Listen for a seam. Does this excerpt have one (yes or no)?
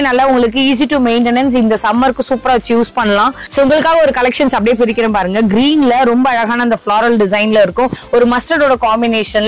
yes